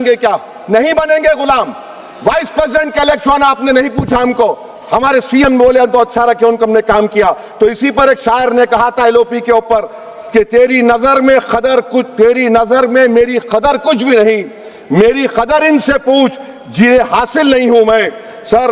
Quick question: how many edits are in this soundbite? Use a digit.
0